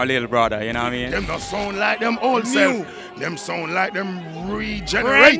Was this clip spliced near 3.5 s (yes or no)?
no